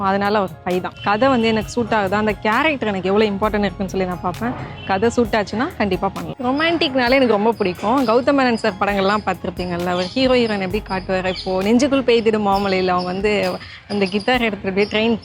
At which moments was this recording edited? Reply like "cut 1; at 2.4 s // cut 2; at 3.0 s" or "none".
cut 1; at 0.9 s // cut 2; at 6.3 s